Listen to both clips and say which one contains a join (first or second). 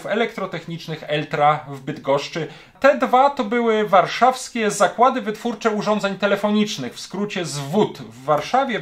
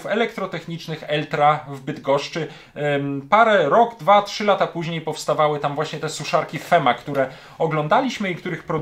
first